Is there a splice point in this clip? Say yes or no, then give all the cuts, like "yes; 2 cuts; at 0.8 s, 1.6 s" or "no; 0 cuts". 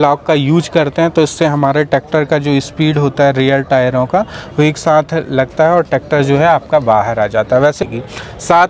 yes; 1 cut; at 7.8 s